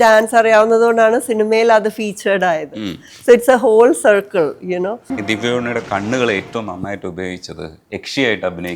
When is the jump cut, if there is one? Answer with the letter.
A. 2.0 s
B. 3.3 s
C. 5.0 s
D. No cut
C